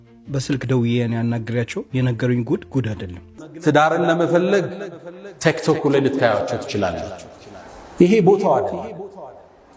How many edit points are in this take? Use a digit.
1